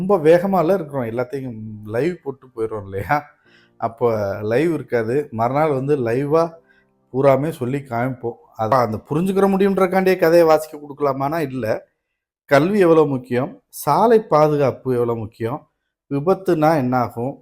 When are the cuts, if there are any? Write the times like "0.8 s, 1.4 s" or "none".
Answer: 8.7 s